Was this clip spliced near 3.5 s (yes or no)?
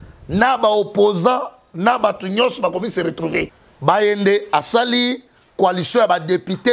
yes